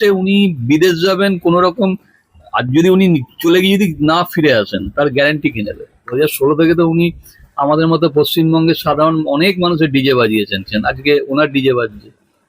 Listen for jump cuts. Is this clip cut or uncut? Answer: cut